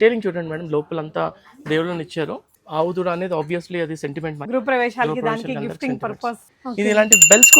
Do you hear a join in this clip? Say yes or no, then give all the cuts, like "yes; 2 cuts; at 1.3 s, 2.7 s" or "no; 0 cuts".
yes; 3 cuts; at 2.5 s, 4.4 s, 6.5 s